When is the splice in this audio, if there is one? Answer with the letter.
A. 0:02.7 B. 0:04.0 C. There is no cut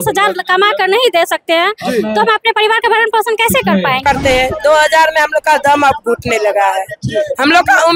B